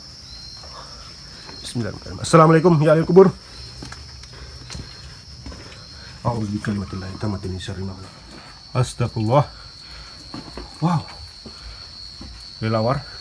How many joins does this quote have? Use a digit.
1